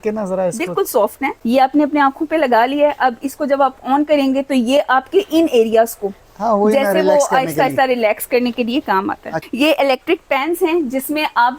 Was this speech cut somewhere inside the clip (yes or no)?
yes